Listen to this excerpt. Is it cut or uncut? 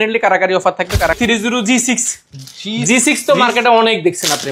cut